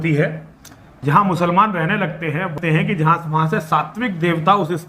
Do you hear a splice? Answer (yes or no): yes